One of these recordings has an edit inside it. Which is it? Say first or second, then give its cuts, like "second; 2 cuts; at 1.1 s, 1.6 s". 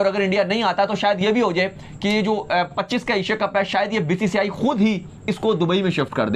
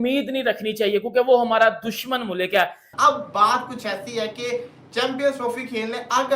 second; 1 cut; at 2.8 s